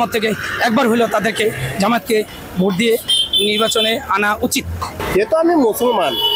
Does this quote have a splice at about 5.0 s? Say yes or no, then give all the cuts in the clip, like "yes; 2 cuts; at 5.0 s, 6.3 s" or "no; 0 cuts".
yes; 1 cut; at 5.0 s